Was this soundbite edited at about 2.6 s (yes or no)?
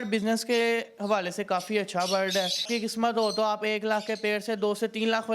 yes